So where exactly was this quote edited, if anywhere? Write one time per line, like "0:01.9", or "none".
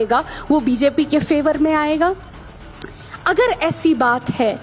none